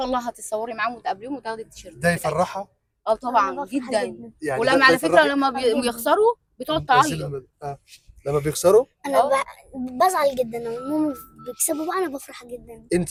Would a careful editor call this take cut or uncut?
uncut